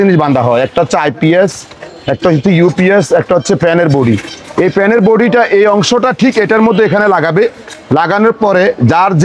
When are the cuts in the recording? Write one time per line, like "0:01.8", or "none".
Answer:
none